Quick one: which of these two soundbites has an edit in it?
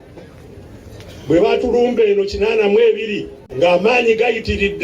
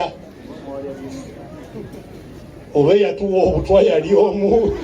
first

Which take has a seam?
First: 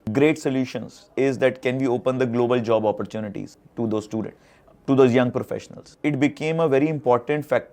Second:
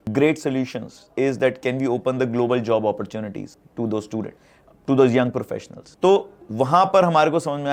first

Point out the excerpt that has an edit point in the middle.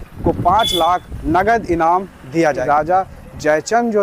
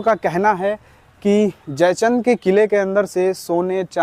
first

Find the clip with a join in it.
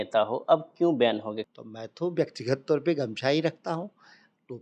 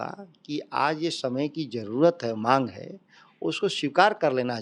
first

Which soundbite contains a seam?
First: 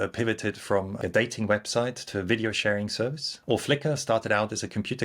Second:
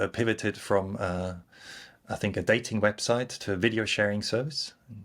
first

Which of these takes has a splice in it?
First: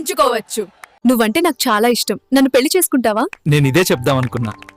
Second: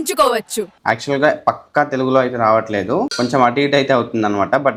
first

